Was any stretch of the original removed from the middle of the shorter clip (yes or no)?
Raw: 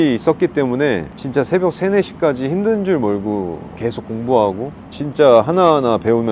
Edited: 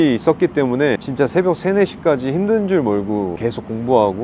yes